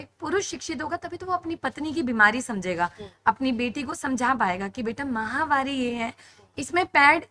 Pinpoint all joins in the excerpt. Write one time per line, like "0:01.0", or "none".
none